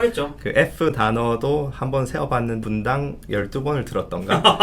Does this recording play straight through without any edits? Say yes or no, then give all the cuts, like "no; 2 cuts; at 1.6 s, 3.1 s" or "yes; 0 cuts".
no; 1 cut; at 2.6 s